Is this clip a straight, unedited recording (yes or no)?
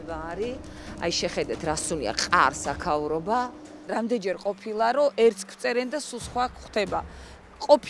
no